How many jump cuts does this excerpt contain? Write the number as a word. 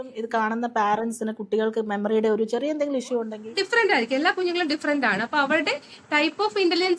one